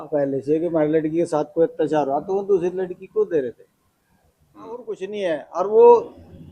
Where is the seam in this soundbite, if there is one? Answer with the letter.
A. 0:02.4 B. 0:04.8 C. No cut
B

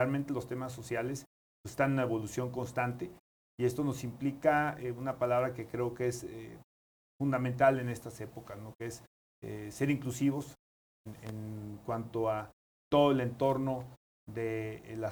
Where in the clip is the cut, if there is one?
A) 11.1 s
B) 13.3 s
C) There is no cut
C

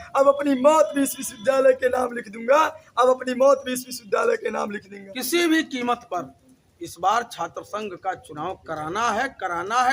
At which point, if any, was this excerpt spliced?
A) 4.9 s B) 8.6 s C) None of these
A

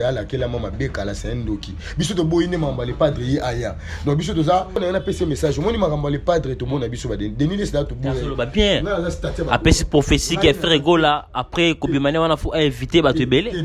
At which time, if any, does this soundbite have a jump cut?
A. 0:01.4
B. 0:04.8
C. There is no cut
B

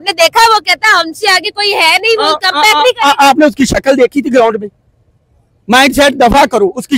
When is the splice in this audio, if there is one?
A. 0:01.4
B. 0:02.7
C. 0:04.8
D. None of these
D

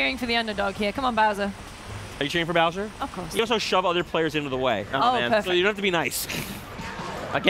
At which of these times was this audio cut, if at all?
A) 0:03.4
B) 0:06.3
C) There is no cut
A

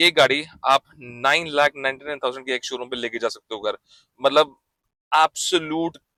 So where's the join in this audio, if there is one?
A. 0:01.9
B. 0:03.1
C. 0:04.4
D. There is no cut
D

